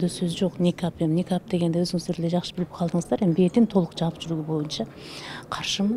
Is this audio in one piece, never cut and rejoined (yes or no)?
yes